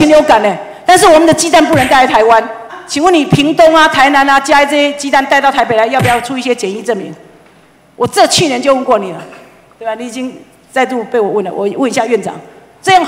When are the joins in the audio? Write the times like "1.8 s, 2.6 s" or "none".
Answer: 2.7 s